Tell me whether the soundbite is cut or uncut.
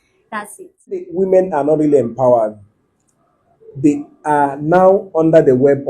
cut